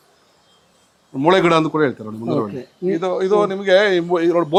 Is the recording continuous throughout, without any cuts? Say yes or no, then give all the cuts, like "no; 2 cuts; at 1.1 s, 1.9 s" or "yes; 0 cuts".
yes; 0 cuts